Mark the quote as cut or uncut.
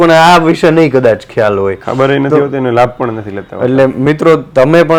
uncut